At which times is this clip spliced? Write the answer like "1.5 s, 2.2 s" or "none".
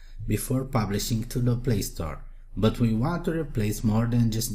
3.0 s